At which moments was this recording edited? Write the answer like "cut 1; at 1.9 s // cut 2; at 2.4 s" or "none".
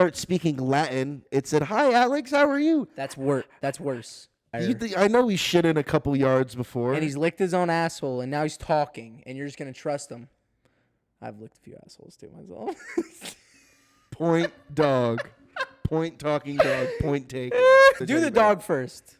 cut 1; at 4.5 s // cut 2; at 18.0 s